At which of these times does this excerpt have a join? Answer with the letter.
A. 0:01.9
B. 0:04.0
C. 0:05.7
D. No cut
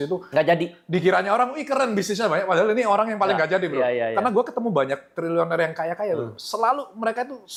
D